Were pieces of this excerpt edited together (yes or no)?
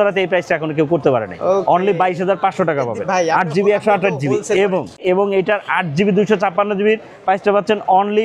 no